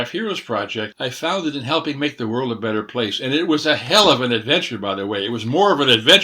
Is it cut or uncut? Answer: cut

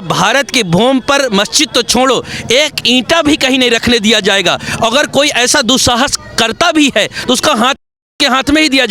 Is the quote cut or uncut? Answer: uncut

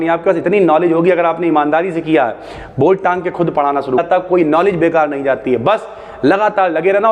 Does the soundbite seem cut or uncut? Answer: cut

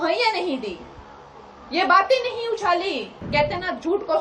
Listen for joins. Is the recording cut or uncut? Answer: cut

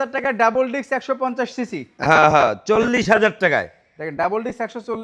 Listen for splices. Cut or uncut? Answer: uncut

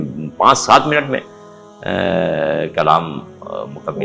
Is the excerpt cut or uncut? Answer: uncut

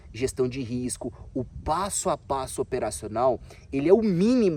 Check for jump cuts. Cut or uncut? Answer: uncut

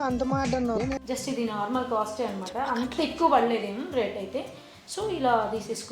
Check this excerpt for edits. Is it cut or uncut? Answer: cut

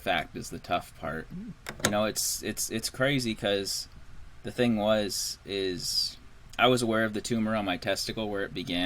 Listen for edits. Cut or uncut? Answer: cut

